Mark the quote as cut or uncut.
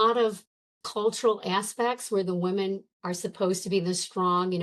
uncut